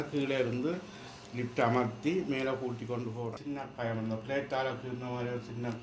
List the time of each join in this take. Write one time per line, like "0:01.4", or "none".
0:03.5